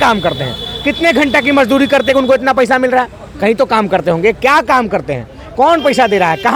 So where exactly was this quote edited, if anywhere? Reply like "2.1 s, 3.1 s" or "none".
none